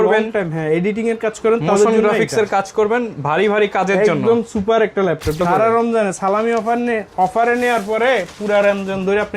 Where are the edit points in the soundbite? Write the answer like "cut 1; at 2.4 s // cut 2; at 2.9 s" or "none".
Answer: cut 1; at 5.4 s

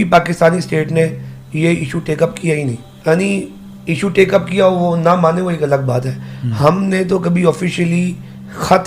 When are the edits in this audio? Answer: cut 1; at 2.9 s

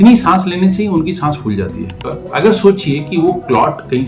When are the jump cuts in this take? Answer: cut 1; at 2.0 s

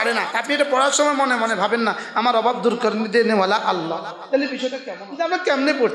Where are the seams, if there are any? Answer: cut 1; at 5.0 s

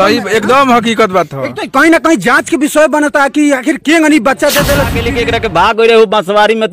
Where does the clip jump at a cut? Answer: cut 1; at 5.0 s

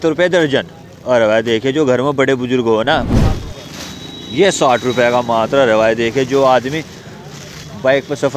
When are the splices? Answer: cut 1; at 3.1 s

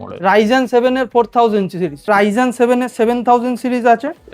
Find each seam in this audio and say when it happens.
cut 1; at 2.1 s

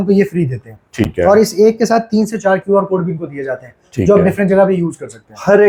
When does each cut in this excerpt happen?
none

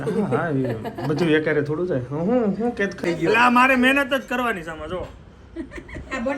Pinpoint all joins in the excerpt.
cut 1; at 3.0 s

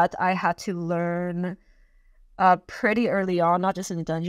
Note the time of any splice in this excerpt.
none

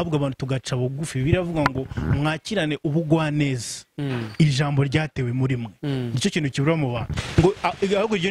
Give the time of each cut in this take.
cut 1; at 7.1 s

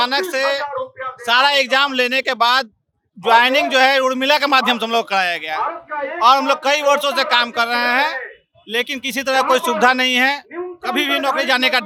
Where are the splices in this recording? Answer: none

